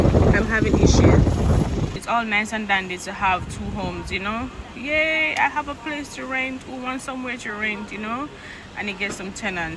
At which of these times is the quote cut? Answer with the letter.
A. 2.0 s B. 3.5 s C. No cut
A